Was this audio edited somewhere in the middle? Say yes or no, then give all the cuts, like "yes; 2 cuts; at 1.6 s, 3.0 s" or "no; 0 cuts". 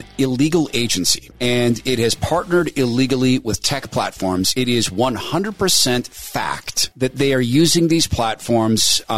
no; 0 cuts